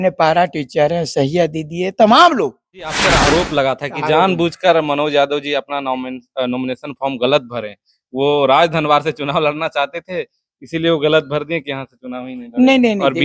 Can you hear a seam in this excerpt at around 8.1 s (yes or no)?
no